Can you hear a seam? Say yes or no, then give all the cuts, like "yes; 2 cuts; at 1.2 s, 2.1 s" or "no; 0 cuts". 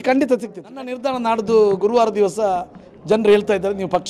yes; 1 cut; at 0.9 s